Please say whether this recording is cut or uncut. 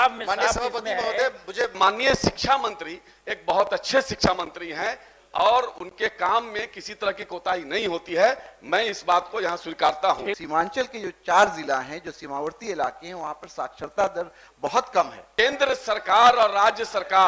cut